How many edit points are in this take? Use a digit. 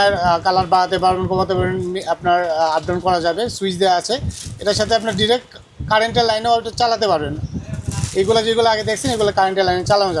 0